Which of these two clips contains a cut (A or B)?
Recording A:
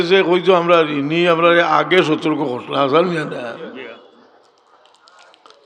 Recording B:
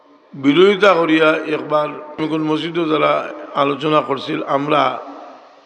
B